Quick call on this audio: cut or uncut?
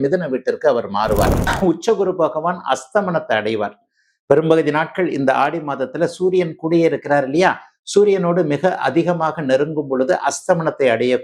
cut